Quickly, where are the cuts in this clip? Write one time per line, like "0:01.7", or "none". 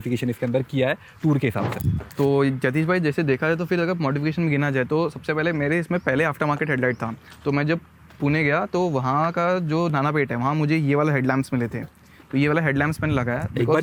none

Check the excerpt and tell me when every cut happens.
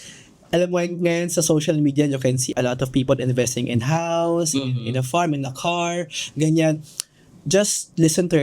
0:02.4

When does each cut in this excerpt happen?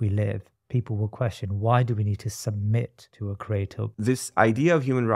0:03.5

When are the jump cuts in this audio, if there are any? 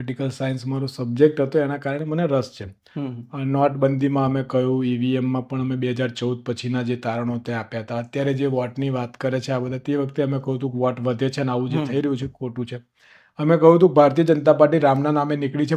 none

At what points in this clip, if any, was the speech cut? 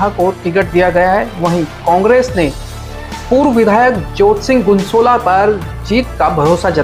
none

